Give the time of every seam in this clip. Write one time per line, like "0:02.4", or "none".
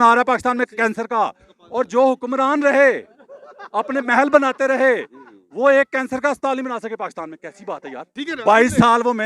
0:08.1